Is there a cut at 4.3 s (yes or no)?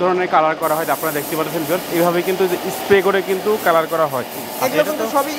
no